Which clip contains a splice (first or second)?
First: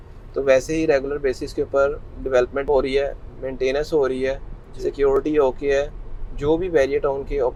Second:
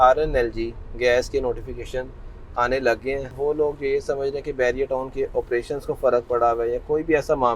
second